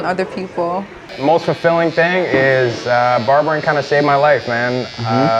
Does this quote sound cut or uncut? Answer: cut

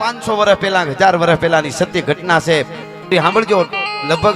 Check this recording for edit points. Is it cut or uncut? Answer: cut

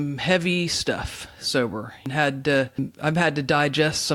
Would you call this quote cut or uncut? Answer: cut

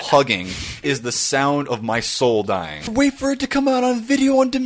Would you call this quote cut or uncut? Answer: cut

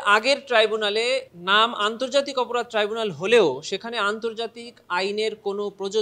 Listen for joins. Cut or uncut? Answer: uncut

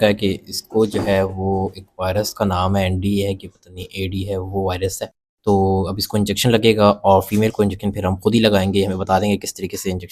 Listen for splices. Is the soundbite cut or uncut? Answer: uncut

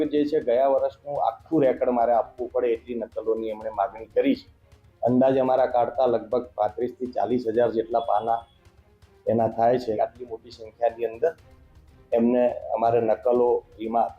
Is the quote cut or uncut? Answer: cut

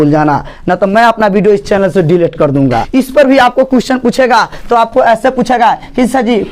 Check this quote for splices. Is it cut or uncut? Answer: cut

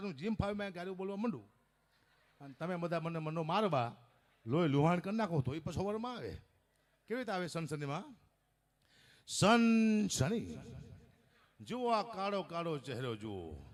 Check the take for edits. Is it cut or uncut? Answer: uncut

